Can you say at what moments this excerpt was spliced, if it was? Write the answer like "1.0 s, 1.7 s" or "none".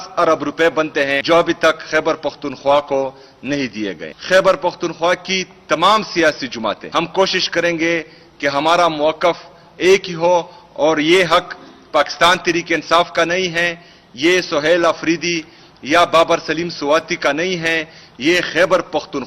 1.2 s, 4.1 s, 6.8 s